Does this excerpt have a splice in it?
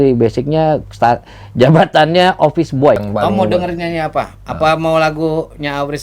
yes; 1 cut; at 3.0 s

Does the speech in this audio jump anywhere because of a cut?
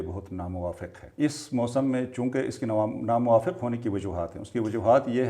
yes; 1 cut; at 1.0 s

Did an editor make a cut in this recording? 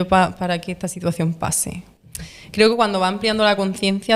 yes; 1 cut; at 1.9 s

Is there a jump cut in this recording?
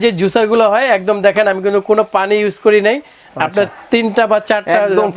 no; 0 cuts

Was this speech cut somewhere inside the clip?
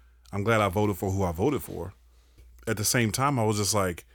yes; 1 cut; at 2.4 s

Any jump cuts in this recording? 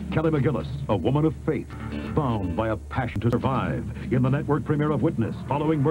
yes; 2 cuts; at 2.0 s, 3.2 s

